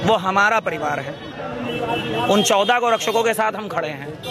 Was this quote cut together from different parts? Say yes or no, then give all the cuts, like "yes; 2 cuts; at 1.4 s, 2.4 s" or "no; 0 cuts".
no; 0 cuts